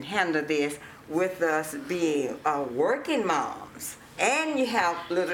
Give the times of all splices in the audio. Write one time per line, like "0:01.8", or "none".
0:04.2